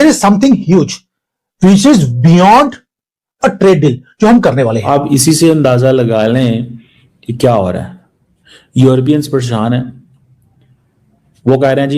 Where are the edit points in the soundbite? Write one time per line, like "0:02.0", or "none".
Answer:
0:04.9